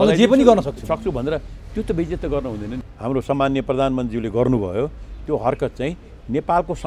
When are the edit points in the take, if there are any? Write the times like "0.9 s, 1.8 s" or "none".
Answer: 2.8 s